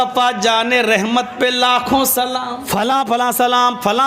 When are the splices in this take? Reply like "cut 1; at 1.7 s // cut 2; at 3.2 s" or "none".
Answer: cut 1; at 2.4 s

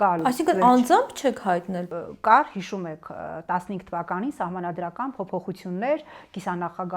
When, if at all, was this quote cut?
cut 1; at 1.9 s

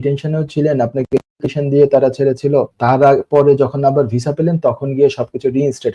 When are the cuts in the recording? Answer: cut 1; at 2.7 s

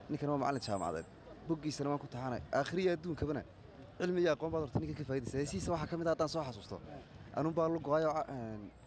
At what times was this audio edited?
none

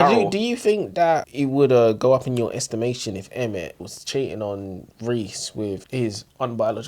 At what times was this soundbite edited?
cut 1; at 1.2 s // cut 2; at 3.9 s // cut 3; at 5.8 s

